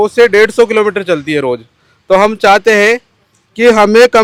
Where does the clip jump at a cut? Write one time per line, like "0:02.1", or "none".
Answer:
none